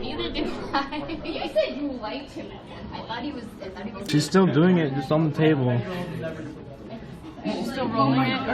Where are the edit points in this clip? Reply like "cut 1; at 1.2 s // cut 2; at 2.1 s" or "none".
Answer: cut 1; at 4.1 s